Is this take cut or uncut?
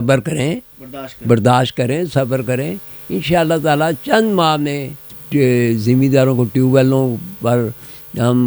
cut